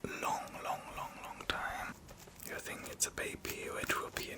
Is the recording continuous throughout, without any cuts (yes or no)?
no